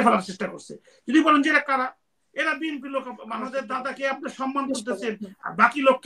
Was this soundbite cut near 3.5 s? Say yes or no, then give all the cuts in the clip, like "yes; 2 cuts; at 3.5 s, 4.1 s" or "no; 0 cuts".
yes; 1 cut; at 3.5 s